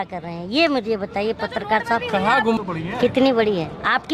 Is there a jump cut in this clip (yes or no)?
no